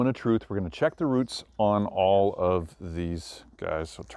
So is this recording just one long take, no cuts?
yes; 0 cuts

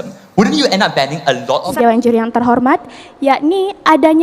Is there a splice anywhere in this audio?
yes; 1 cut; at 1.6 s

